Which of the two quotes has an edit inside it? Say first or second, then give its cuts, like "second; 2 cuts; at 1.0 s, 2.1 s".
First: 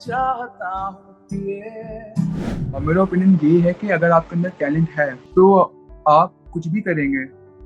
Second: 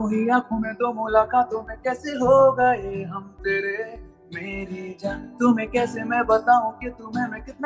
first; 2 cuts; at 2.6 s, 5.2 s